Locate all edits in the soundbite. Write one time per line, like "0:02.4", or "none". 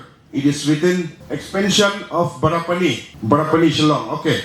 0:01.2
0:03.1